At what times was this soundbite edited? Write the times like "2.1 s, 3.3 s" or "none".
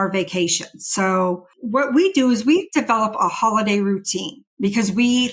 1.5 s